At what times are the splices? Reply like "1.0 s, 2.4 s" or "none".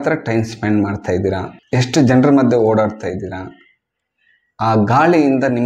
1.5 s